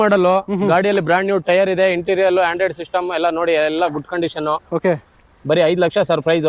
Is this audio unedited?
yes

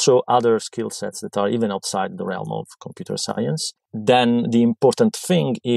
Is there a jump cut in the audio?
yes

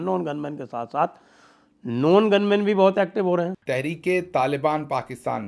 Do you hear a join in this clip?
yes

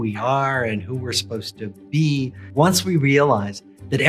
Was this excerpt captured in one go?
no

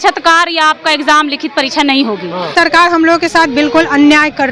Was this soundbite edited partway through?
yes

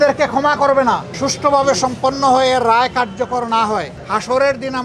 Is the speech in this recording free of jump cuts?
no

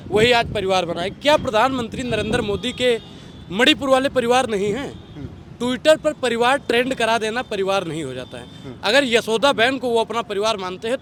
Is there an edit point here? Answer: no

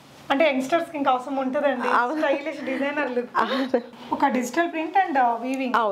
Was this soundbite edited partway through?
yes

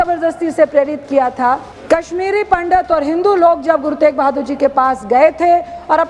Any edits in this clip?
yes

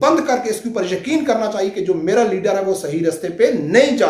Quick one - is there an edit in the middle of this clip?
no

